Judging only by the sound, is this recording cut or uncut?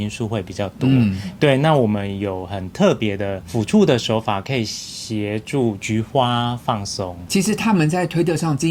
uncut